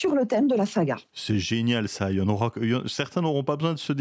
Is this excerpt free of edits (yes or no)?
no